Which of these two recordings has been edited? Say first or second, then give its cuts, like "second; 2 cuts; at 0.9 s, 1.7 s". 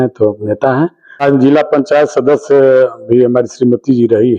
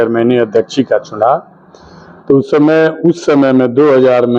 first; 1 cut; at 1.2 s